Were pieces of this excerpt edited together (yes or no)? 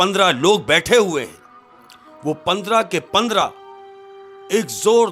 no